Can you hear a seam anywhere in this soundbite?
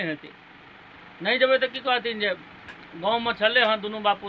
no; 0 cuts

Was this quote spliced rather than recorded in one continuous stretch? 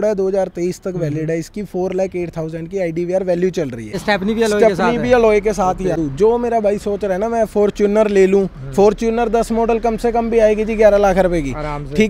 yes; 2 cuts; at 4.0 s, 6.0 s

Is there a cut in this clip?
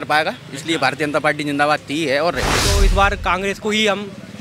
yes; 1 cut; at 2.7 s

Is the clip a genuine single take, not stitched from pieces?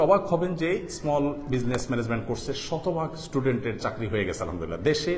yes; 0 cuts

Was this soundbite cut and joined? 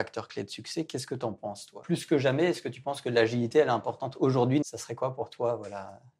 yes; 2 cuts; at 1.8 s, 4.6 s

